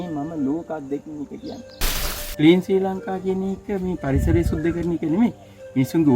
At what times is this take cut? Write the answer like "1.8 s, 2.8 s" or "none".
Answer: 2.1 s